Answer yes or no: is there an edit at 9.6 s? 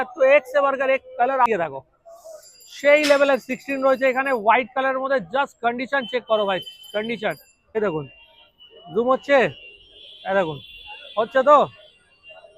no